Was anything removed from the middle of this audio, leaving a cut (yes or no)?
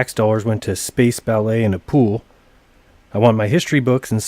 yes